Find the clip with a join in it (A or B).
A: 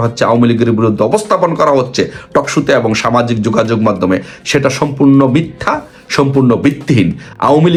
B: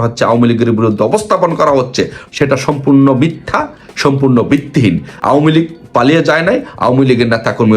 B